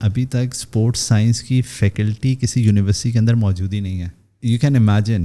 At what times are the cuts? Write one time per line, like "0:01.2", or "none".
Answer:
0:04.3